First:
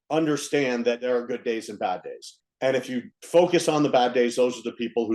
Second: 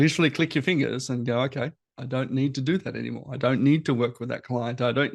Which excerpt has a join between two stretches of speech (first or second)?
first